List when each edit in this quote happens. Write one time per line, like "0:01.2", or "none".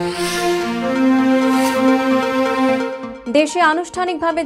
0:03.0